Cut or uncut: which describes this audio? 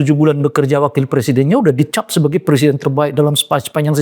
uncut